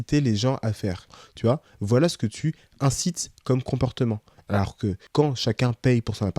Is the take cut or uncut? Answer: cut